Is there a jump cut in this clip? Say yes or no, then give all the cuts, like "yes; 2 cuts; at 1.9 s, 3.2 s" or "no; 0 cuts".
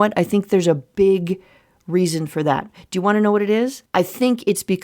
yes; 1 cut; at 3.8 s